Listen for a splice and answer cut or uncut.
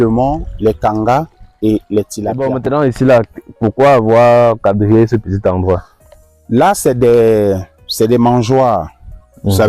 cut